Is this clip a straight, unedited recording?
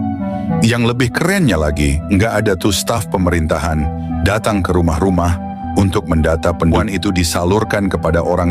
no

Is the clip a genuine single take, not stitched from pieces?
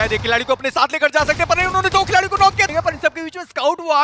no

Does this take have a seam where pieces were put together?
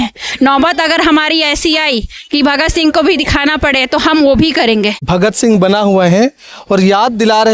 yes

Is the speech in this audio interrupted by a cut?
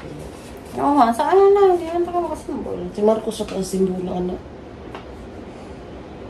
no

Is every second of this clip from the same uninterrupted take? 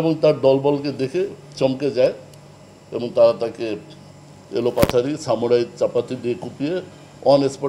yes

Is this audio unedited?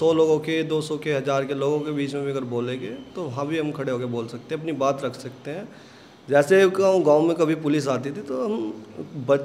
yes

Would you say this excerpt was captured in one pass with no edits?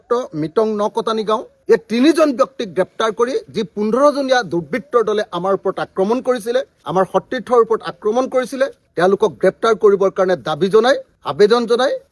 yes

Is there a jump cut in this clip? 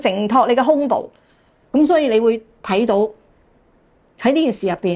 yes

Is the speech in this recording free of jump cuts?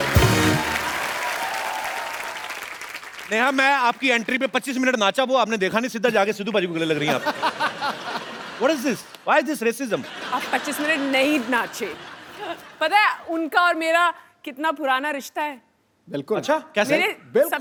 yes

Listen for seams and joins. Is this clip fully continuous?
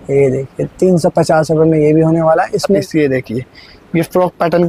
no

